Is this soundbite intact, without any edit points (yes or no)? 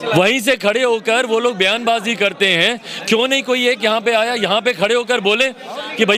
yes